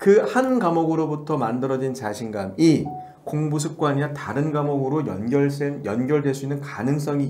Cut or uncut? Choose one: uncut